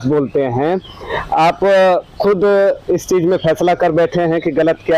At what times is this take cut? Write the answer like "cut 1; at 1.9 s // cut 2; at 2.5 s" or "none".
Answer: none